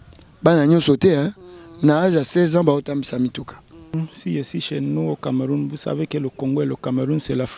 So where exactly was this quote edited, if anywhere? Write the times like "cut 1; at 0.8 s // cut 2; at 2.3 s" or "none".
cut 1; at 3.9 s